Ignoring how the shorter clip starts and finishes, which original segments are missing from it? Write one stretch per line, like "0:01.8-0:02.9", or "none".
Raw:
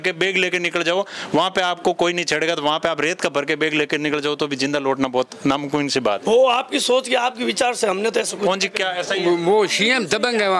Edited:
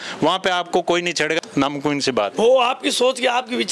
0:02.5-0:05.3